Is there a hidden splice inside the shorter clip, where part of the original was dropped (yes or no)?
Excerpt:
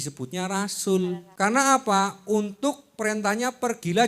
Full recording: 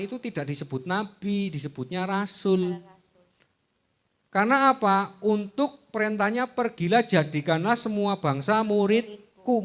yes